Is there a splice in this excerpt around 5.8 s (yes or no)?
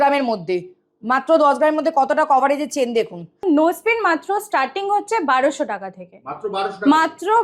no